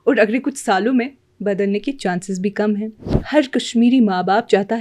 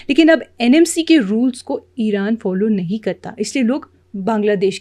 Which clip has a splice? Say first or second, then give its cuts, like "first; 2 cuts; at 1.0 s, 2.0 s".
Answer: first; 1 cut; at 3.1 s